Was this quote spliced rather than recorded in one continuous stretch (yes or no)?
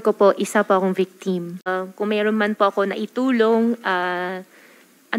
yes